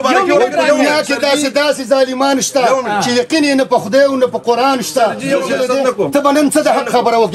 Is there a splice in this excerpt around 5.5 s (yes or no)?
yes